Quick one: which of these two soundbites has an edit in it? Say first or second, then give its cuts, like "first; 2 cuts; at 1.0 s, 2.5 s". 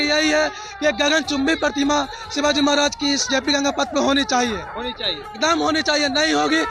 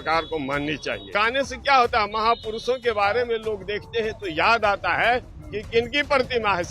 second; 1 cut; at 1.1 s